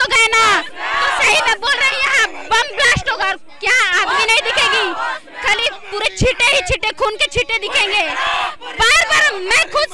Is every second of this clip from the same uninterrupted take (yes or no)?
yes